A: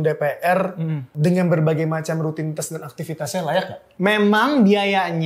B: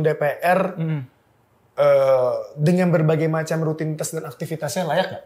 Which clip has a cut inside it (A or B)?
A